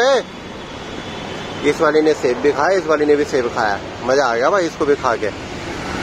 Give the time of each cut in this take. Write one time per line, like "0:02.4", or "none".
none

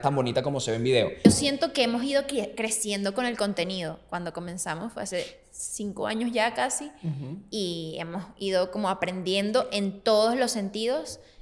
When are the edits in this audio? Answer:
0:01.2

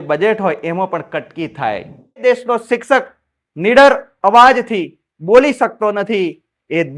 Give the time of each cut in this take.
0:02.2

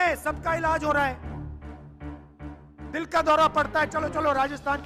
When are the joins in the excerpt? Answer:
none

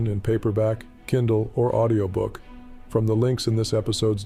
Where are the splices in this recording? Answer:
none

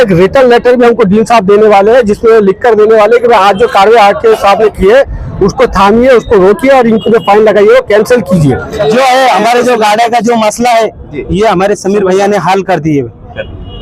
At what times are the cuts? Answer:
0:08.8

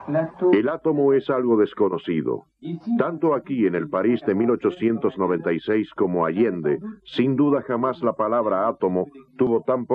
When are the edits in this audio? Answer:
0:04.6

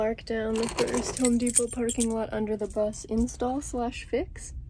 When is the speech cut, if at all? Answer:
none

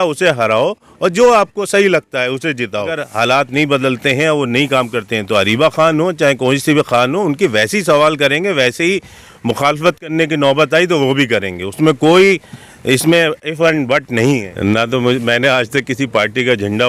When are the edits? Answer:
0:03.0
0:14.5

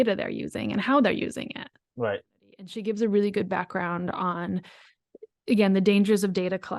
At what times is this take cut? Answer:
0:02.7

